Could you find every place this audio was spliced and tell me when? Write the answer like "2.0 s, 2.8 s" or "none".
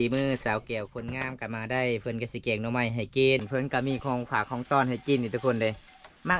3.4 s